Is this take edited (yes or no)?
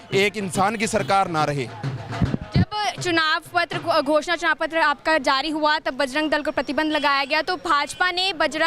no